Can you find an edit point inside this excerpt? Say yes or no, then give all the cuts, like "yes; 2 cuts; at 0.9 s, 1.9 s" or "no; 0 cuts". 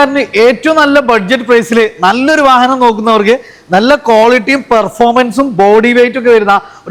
no; 0 cuts